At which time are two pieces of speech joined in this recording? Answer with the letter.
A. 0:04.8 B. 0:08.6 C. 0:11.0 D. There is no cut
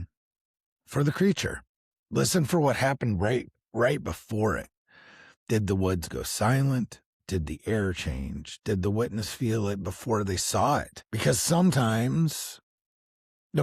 C